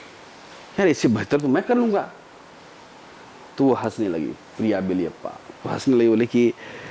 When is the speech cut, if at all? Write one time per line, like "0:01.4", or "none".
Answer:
none